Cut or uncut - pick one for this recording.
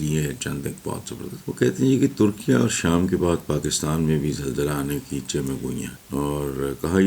cut